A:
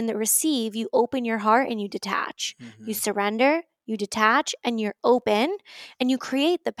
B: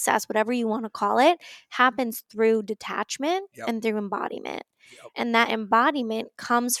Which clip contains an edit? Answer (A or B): B